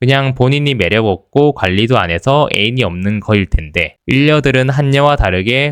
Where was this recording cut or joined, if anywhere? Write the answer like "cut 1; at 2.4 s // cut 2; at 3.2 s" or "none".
none